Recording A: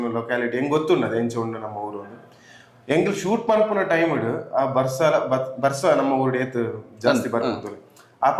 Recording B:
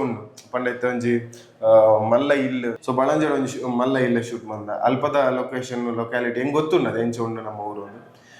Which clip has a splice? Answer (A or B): B